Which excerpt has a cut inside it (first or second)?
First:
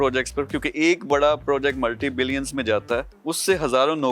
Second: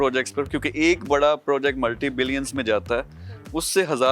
first